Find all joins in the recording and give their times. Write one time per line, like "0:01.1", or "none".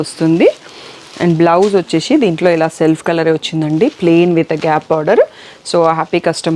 none